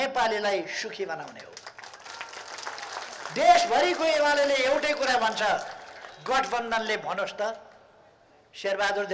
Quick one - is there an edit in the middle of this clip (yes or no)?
no